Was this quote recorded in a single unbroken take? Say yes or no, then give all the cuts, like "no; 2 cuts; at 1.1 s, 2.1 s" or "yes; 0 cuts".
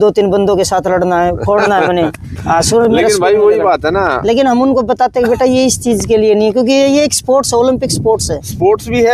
yes; 0 cuts